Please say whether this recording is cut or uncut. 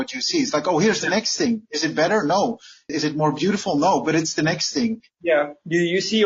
cut